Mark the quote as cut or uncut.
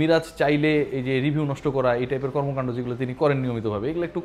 uncut